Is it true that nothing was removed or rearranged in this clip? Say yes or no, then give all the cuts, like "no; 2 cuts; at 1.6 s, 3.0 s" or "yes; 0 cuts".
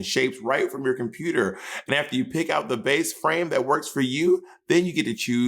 yes; 0 cuts